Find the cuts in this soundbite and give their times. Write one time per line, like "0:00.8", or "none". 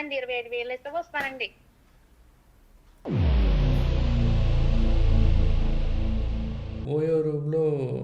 0:06.8